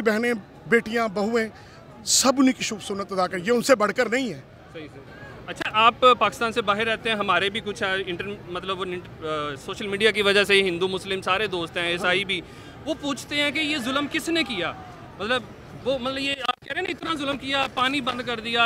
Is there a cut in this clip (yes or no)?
no